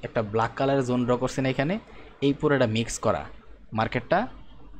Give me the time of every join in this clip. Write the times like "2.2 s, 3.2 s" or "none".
none